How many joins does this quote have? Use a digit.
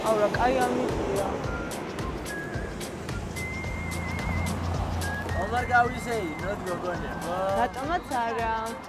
0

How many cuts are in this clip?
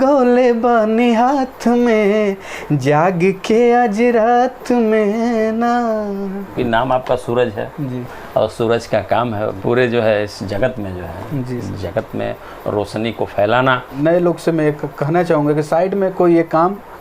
3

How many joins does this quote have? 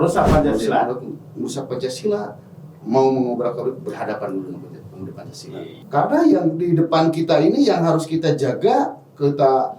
1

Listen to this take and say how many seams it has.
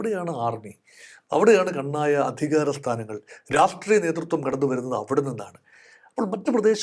0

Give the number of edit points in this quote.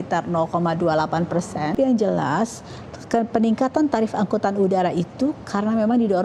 1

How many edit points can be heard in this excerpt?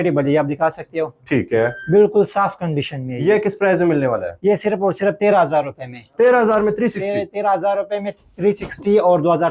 0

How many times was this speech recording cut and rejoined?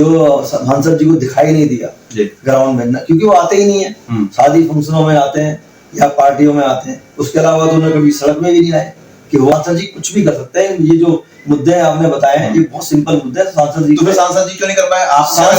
1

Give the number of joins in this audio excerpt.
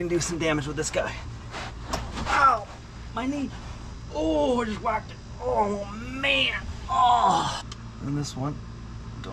1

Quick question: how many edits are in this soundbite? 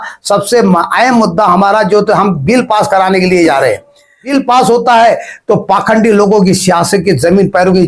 1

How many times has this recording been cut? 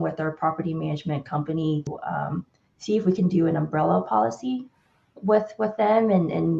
1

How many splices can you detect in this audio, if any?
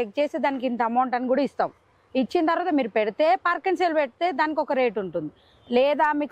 0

